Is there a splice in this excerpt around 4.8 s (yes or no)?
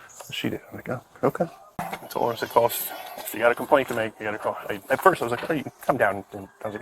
no